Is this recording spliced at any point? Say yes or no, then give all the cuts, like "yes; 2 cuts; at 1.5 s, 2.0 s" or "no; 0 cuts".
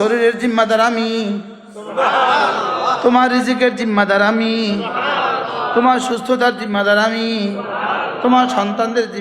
no; 0 cuts